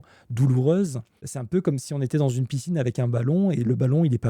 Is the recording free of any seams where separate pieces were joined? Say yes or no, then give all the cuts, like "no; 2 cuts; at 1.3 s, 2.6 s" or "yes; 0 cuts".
no; 1 cut; at 1.3 s